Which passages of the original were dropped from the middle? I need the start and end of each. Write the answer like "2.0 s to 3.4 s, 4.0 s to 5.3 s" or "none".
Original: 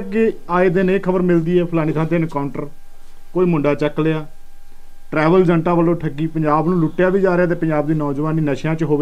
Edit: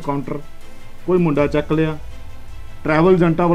none